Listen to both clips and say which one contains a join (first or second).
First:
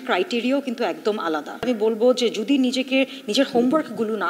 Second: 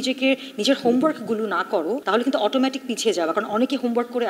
first